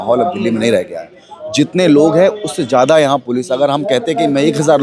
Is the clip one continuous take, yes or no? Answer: yes